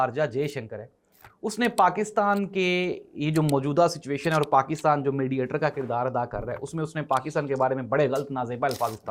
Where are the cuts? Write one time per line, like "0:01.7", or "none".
none